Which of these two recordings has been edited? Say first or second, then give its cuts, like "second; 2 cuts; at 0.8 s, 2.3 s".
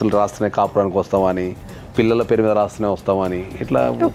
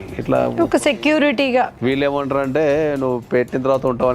second; 1 cut; at 1.7 s